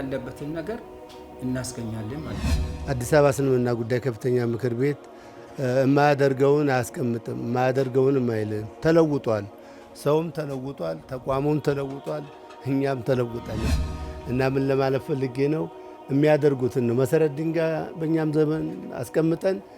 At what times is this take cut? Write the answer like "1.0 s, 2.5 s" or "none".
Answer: 2.6 s